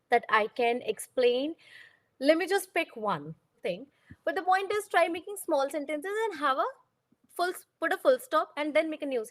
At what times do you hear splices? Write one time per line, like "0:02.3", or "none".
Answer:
0:03.6